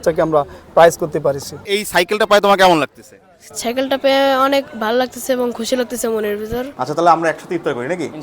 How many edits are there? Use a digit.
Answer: 2